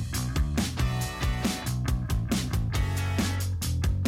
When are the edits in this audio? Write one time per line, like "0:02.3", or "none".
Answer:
0:02.1